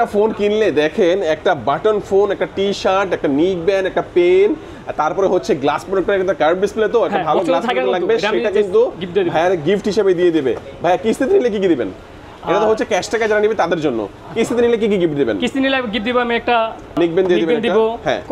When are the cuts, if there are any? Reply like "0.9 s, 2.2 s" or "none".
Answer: 16.9 s